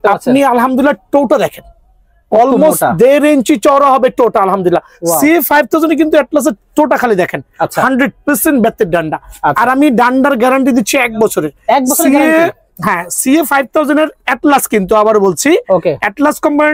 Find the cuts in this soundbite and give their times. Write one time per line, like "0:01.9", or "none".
none